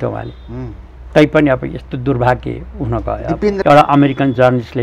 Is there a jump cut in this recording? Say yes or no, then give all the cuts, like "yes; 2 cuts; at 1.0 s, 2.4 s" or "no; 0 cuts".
yes; 1 cut; at 3.6 s